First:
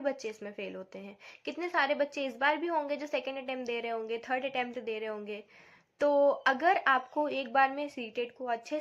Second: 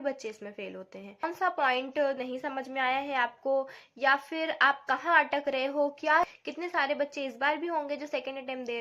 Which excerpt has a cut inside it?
second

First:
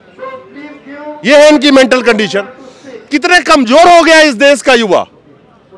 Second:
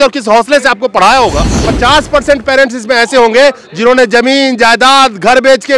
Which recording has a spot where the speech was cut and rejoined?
second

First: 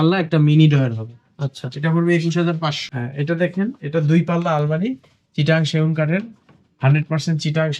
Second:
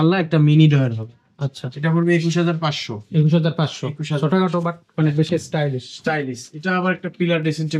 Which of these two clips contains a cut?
first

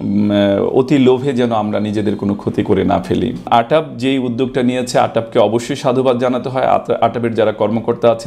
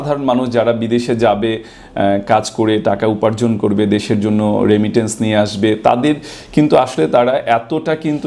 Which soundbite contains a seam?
first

